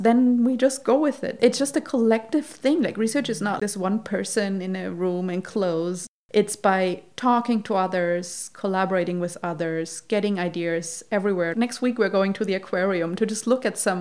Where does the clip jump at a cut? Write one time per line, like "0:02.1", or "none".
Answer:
0:01.3